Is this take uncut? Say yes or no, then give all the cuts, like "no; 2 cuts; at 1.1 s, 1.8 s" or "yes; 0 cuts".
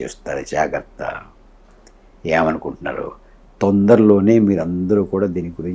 yes; 0 cuts